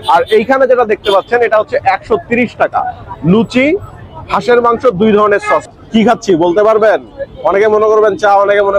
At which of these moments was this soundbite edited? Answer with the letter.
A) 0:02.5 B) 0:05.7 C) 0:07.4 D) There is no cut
B